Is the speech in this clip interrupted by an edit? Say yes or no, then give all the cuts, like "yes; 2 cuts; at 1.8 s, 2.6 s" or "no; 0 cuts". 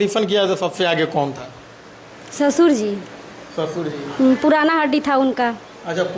no; 0 cuts